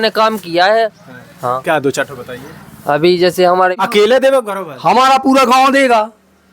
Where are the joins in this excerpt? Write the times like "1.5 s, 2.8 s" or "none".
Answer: 3.7 s